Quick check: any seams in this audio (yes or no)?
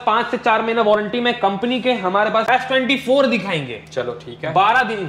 yes